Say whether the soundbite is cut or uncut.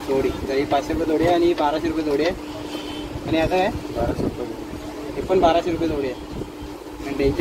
uncut